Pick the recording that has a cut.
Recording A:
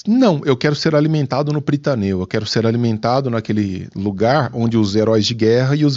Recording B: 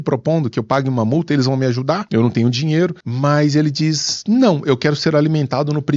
B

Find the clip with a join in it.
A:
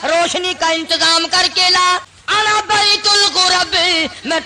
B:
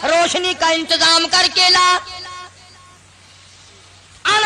A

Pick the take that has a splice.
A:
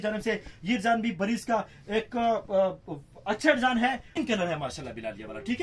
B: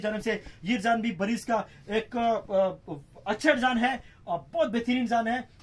A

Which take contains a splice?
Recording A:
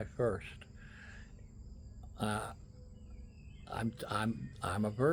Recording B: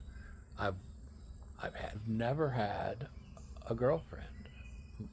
B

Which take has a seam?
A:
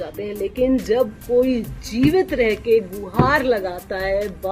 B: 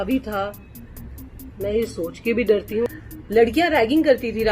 B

